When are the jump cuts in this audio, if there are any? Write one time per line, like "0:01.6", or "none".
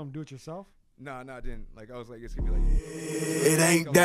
0:02.3